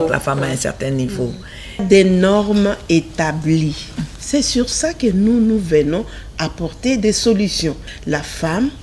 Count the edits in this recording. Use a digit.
2